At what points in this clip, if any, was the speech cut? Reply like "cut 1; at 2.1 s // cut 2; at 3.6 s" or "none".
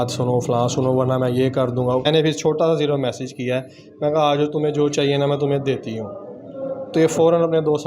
cut 1; at 2.1 s

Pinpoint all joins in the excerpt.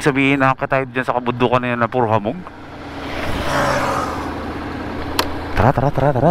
cut 1; at 5.0 s

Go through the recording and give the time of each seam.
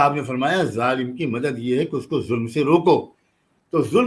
none

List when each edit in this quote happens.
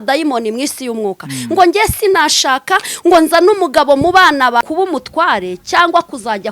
cut 1; at 4.6 s

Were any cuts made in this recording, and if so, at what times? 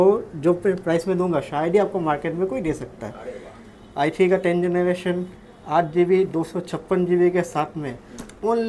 none

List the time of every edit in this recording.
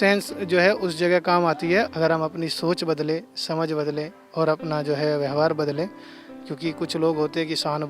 cut 1; at 1.9 s

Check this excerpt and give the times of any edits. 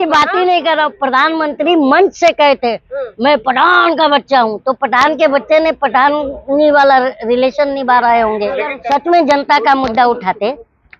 cut 1; at 8.8 s

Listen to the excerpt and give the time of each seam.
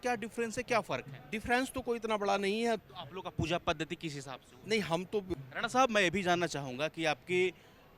cut 1; at 2.8 s // cut 2; at 5.4 s

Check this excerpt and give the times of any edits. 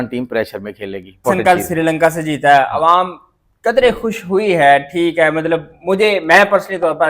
cut 1; at 1.2 s

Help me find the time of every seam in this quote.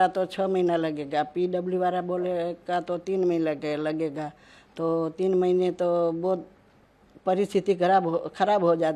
none

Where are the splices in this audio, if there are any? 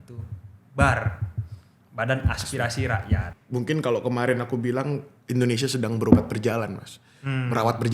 cut 1; at 3.4 s

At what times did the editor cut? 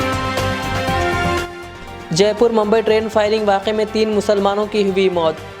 cut 1; at 1.6 s

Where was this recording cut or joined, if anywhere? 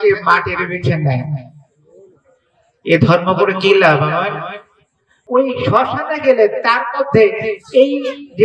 cut 1; at 5.1 s

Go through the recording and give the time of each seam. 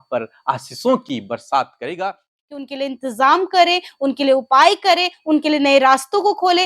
cut 1; at 2.8 s

